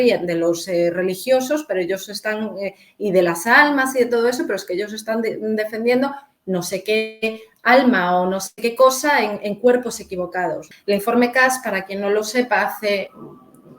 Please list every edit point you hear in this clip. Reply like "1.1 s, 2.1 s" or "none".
10.7 s